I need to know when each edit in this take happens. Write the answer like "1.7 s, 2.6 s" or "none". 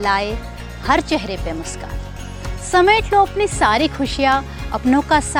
none